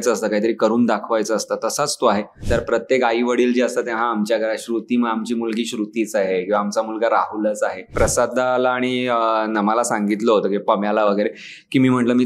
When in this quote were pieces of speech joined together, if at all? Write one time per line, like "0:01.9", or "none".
0:02.4
0:07.9